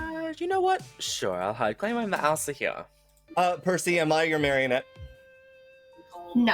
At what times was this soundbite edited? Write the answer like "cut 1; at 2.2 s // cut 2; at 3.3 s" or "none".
cut 1; at 3.1 s